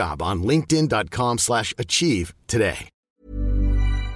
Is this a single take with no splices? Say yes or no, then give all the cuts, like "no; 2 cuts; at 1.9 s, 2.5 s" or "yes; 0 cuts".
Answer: no; 1 cut; at 2.9 s